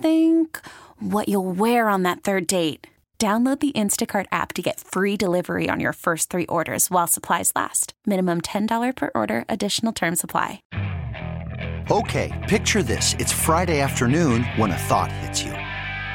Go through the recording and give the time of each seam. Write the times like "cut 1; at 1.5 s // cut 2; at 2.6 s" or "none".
cut 1; at 10.6 s